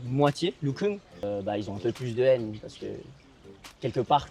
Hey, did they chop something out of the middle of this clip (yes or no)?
yes